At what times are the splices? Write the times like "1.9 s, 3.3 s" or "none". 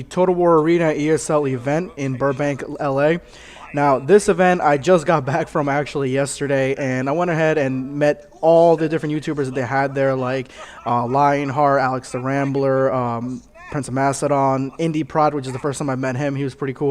none